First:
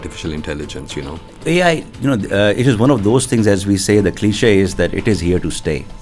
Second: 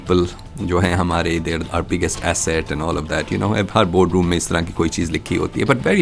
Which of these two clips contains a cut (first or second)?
first